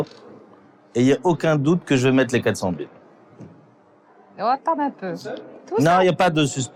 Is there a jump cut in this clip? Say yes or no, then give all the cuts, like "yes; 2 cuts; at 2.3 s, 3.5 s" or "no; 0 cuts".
no; 0 cuts